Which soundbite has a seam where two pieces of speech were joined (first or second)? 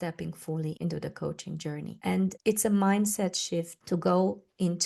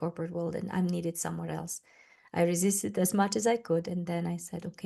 first